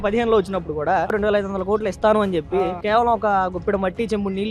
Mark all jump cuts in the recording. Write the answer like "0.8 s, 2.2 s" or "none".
1.1 s